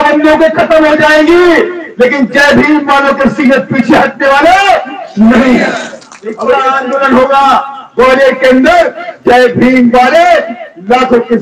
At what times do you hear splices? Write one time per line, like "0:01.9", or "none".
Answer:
0:06.4